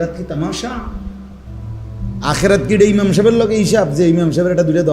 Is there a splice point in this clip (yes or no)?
yes